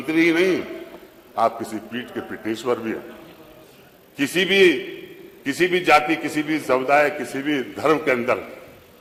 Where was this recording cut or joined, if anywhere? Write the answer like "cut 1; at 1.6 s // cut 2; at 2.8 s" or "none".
none